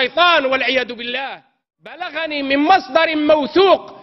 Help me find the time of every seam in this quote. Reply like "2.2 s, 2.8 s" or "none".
2.0 s